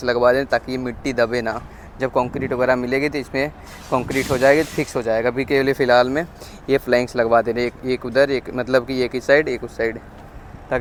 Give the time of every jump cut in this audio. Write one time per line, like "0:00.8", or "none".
none